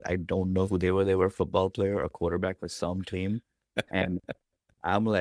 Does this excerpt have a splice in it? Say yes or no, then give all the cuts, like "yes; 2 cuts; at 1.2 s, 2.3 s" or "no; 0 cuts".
no; 0 cuts